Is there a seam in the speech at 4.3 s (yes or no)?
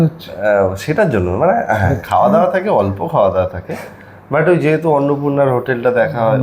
no